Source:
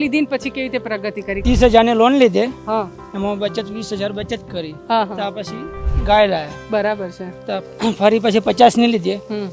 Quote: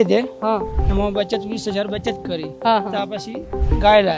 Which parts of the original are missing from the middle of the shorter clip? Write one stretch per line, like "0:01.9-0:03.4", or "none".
none